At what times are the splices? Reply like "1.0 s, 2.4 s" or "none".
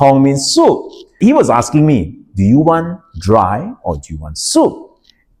1.1 s

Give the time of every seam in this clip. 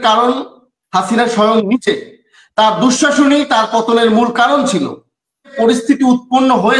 5.5 s

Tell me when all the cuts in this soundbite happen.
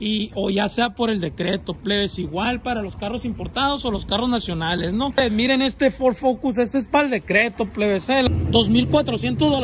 5.1 s, 8.3 s

